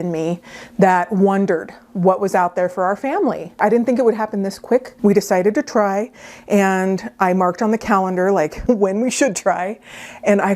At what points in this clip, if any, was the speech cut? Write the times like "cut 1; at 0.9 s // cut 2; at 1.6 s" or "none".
cut 1; at 3.5 s // cut 2; at 4.9 s